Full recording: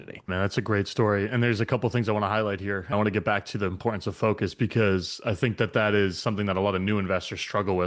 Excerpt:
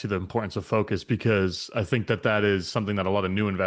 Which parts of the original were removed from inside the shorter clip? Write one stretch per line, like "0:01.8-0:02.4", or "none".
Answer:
none